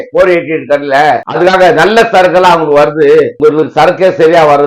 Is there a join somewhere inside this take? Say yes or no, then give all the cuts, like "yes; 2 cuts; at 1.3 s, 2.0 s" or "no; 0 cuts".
no; 0 cuts